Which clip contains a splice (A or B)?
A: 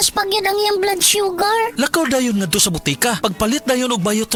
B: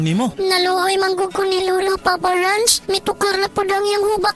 B